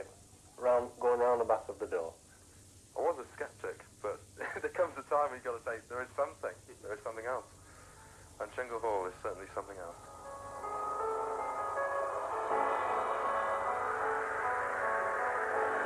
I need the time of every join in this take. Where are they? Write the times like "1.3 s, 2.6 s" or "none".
13.4 s